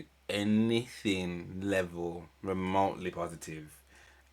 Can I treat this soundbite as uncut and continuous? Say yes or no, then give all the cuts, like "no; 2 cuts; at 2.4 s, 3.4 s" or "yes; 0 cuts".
yes; 0 cuts